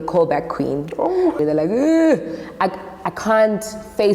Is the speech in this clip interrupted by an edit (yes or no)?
yes